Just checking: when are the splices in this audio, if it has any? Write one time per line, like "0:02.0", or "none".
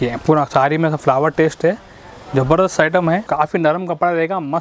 0:03.2